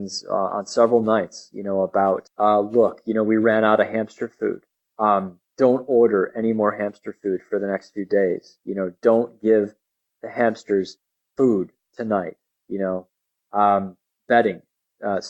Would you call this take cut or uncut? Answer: cut